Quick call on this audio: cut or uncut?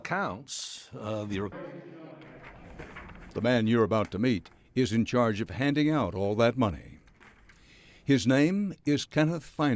uncut